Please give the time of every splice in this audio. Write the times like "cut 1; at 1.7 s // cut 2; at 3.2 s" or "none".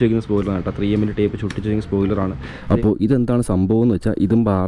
cut 1; at 2.5 s

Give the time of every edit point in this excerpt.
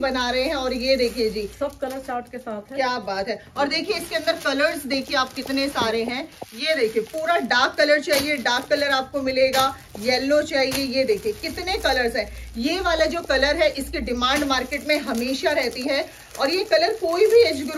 none

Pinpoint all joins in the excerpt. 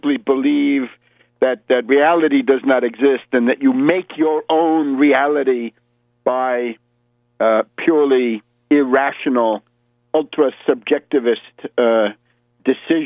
none

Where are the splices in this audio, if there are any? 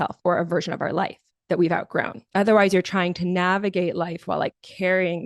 cut 1; at 2.2 s

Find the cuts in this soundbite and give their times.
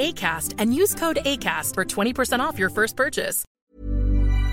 cut 1; at 3.4 s

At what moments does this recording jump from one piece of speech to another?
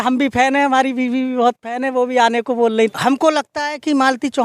cut 1; at 2.9 s

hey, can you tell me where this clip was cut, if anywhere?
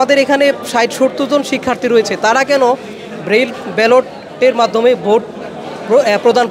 none

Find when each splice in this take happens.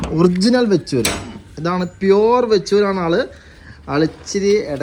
none

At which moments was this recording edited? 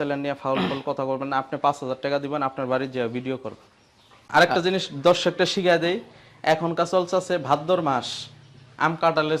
cut 1; at 4.1 s

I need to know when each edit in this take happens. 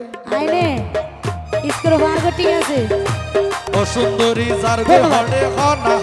cut 1; at 3.7 s

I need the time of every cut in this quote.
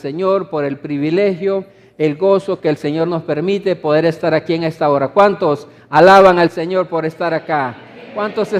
cut 1; at 5.8 s

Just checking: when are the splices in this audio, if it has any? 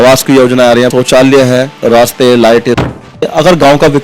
cut 1; at 0.9 s // cut 2; at 1.8 s // cut 3; at 2.9 s

